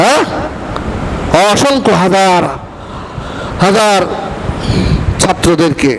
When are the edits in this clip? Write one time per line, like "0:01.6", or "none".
none

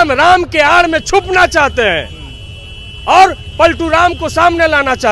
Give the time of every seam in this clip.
none

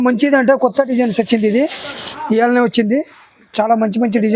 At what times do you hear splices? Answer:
none

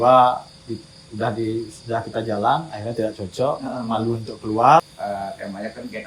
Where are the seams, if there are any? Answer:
0:04.9

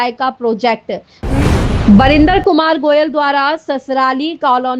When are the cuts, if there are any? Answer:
0:01.1

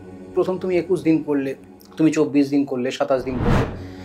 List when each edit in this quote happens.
none

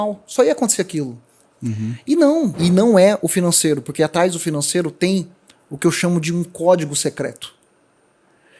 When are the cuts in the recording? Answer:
0:02.6

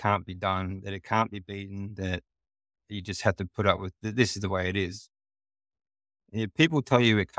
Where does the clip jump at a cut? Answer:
0:02.8
0:04.0

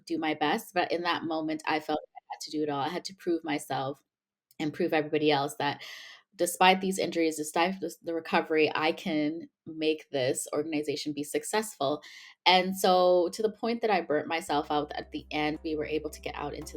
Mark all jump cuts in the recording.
0:15.6

